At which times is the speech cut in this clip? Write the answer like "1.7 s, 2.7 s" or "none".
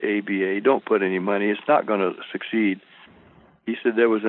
none